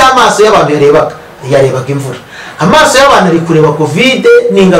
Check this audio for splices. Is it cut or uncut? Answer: uncut